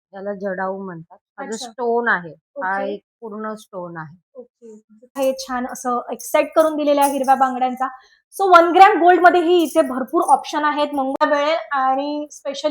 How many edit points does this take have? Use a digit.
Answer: 2